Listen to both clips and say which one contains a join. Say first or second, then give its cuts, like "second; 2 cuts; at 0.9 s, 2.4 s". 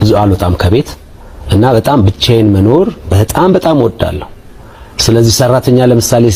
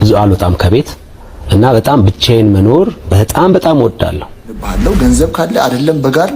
second; 1 cut; at 4.7 s